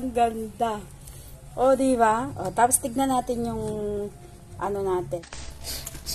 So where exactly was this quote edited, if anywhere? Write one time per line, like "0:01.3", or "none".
0:05.2